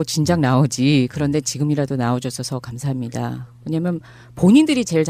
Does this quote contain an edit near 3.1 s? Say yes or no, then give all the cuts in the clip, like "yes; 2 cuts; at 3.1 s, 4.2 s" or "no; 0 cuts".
yes; 1 cut; at 3.1 s